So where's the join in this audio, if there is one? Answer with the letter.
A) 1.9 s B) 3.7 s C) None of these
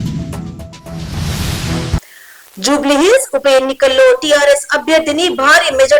A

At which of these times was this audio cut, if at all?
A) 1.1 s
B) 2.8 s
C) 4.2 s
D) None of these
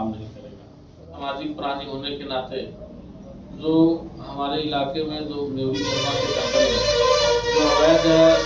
A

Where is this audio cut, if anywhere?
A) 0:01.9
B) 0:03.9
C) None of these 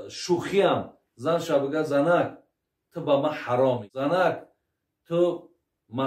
B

